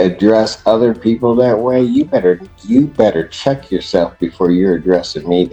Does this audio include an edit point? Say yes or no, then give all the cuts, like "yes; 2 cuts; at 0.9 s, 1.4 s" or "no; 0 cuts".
no; 0 cuts